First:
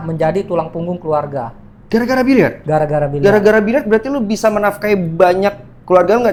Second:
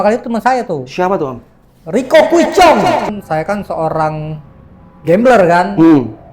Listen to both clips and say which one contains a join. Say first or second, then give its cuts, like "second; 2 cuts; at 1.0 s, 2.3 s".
second; 1 cut; at 3.2 s